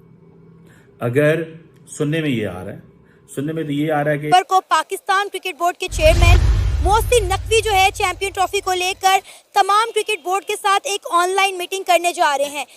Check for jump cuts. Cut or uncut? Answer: cut